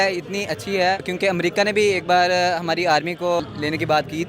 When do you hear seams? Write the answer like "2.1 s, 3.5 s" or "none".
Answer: 1.1 s, 3.4 s